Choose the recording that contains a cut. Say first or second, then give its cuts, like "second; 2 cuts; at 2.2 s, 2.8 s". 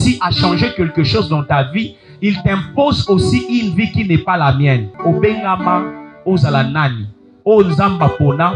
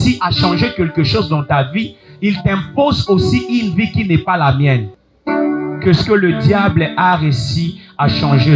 first; 1 cut; at 4.9 s